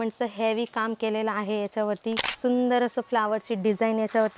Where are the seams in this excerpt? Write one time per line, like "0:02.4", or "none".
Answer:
0:02.2